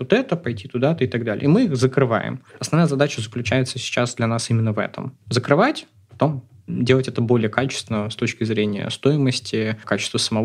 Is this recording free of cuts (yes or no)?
yes